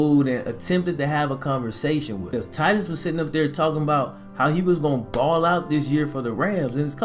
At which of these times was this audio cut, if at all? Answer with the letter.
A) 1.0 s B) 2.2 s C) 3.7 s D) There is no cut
B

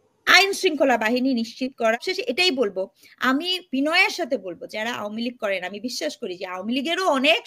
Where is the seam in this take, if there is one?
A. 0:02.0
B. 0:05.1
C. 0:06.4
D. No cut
A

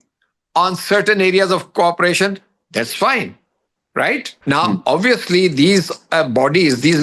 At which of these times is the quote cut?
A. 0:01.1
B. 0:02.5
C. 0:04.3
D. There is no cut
C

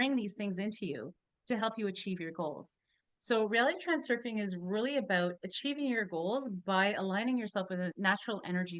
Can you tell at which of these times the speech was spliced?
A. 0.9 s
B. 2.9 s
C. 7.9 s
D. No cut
C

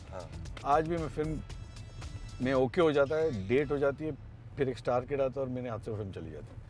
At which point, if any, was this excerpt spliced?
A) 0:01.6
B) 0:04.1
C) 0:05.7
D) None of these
D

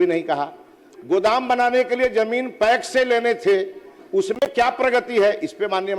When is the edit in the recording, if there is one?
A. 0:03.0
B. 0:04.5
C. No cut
C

